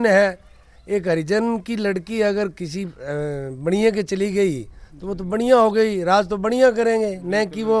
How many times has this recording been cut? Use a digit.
0